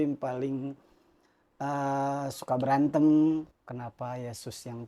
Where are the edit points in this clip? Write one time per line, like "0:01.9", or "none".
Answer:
0:03.5